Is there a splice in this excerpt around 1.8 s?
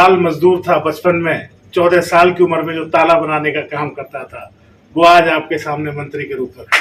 no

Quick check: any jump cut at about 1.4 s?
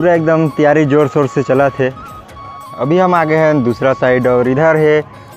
no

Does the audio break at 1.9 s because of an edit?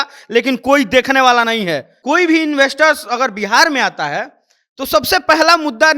yes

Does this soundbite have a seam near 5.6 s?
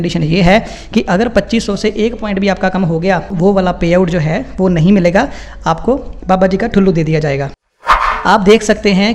no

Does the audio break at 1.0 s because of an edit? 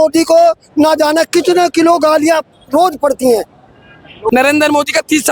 no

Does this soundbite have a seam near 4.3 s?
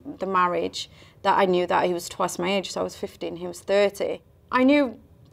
yes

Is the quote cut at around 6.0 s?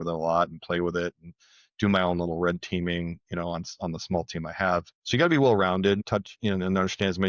yes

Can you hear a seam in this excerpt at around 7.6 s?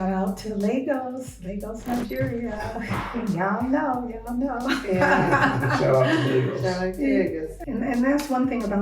yes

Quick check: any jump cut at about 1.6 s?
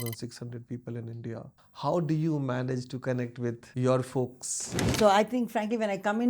yes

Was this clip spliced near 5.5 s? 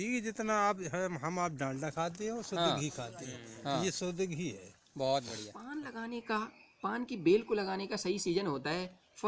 yes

